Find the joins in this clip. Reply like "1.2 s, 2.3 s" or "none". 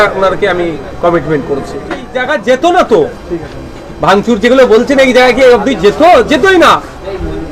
2.2 s